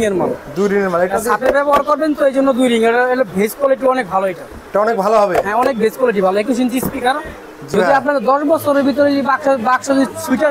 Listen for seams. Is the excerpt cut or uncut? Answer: cut